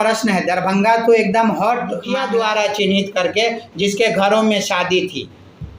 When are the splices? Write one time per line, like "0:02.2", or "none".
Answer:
0:02.1